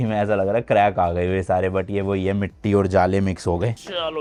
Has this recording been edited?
no; 0 cuts

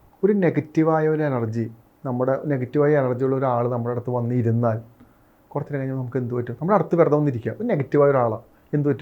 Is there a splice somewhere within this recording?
no; 0 cuts

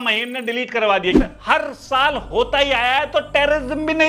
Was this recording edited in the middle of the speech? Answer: yes; 1 cut; at 1.2 s

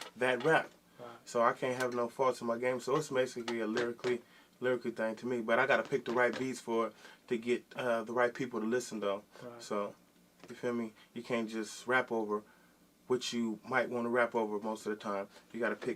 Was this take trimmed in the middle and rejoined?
no; 0 cuts

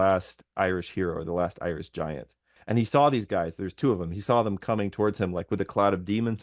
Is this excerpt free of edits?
no; 1 cut; at 2.5 s

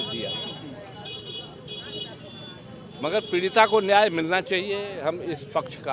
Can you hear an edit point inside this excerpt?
no; 0 cuts

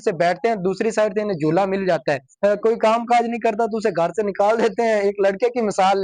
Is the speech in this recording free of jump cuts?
no; 1 cut; at 2.3 s

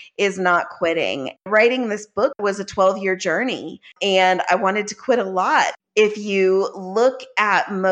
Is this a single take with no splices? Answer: no; 4 cuts; at 1.5 s, 2.4 s, 3.9 s, 5.7 s

